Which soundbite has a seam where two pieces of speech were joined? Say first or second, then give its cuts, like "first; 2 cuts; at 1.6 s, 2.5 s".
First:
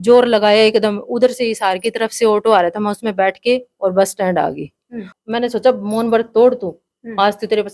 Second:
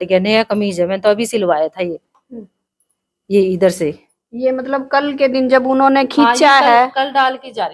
first; 1 cut; at 5.1 s